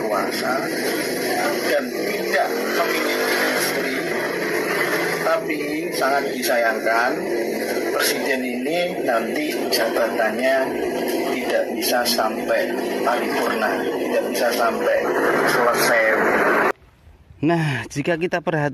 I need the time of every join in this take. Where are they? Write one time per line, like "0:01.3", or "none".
none